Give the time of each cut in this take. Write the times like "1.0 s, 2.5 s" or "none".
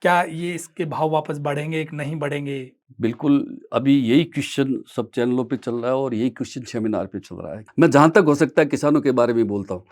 7.6 s